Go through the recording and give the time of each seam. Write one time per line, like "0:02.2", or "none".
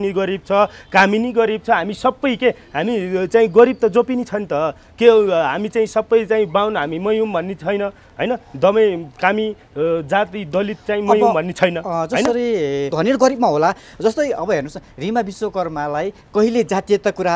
0:12.9